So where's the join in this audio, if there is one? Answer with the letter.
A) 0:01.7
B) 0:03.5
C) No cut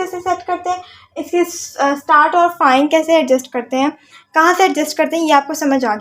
C